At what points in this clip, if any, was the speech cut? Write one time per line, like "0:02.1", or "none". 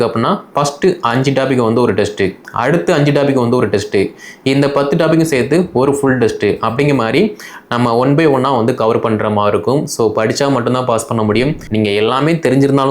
0:11.6